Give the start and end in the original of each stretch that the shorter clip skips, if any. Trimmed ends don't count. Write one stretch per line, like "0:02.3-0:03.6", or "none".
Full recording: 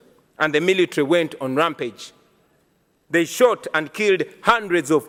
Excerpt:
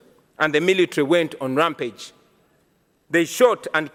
none